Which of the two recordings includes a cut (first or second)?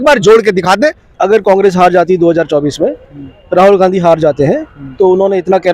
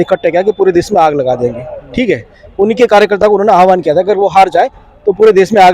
first